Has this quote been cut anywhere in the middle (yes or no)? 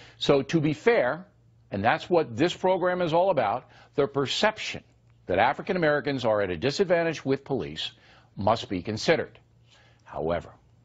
yes